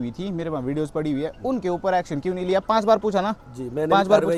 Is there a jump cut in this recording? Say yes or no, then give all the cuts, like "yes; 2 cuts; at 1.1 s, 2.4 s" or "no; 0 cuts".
no; 0 cuts